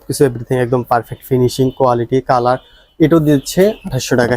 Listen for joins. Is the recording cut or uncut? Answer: uncut